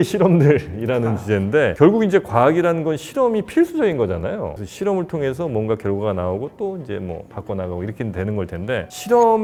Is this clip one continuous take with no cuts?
yes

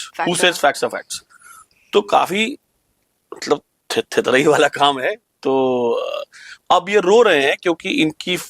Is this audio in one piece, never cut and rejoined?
yes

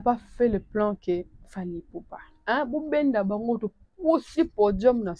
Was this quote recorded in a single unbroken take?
no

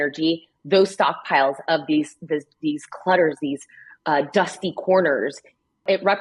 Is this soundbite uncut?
yes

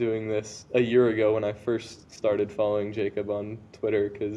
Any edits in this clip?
no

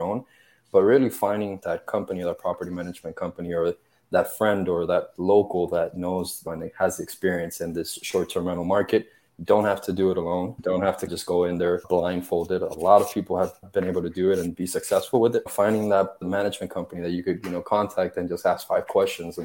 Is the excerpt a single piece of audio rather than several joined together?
no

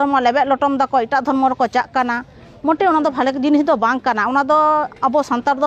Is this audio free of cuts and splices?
yes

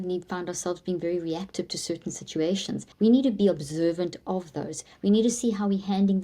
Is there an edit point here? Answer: yes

